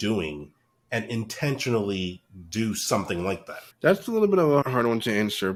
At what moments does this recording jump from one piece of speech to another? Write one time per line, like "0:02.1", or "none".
none